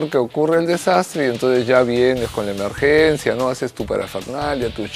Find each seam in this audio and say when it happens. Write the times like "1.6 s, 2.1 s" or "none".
none